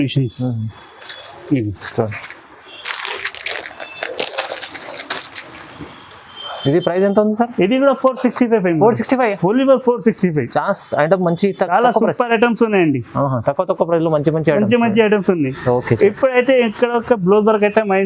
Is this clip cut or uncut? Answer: uncut